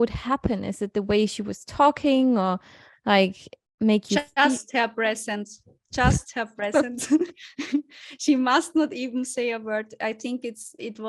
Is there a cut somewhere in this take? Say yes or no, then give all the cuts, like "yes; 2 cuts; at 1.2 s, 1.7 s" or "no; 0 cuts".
no; 0 cuts